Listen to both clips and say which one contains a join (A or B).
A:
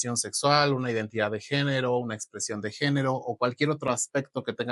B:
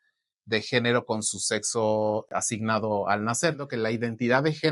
B